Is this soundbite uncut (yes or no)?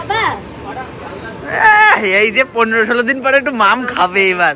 yes